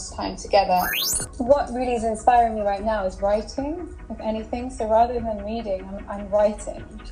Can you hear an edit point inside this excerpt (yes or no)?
yes